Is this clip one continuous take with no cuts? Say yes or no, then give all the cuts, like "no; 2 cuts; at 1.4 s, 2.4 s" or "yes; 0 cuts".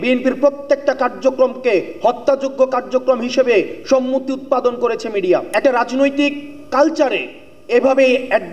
no; 1 cut; at 5.5 s